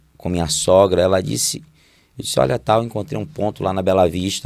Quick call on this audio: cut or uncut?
uncut